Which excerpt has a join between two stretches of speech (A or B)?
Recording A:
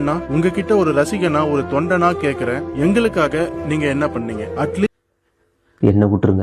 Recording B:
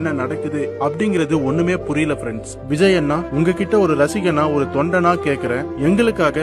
A